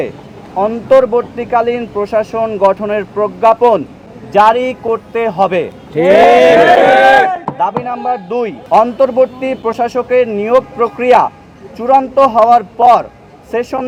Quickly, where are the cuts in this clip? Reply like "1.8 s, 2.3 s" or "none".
none